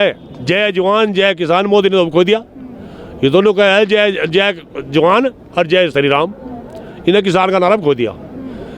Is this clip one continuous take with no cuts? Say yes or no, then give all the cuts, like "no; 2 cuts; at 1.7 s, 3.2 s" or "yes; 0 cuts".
yes; 0 cuts